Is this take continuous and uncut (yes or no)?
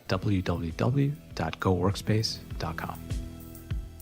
no